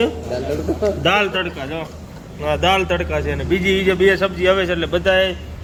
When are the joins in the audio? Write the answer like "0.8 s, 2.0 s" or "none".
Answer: none